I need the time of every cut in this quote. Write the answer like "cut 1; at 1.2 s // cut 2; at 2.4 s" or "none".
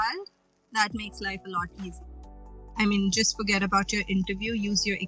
cut 1; at 2.0 s